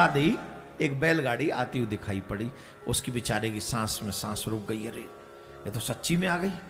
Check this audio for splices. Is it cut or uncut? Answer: uncut